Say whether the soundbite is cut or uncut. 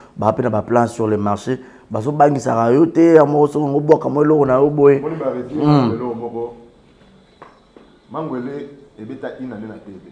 uncut